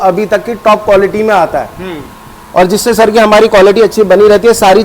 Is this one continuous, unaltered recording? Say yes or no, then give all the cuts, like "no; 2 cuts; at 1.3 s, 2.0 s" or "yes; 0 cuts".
yes; 0 cuts